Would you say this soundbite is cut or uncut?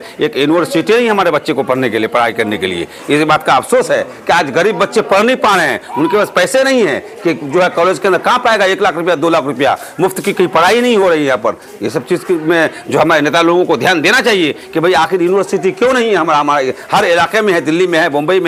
uncut